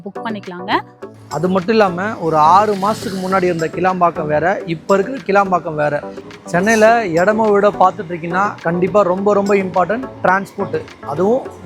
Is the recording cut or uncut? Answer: cut